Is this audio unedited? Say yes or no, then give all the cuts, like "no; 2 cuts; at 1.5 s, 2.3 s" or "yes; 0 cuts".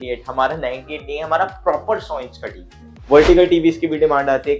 no; 1 cut; at 2.9 s